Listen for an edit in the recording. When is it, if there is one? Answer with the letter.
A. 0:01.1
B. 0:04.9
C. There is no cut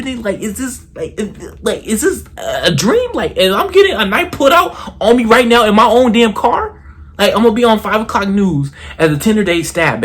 A